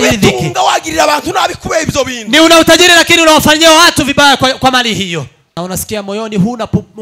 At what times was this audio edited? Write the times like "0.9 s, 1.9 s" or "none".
5.4 s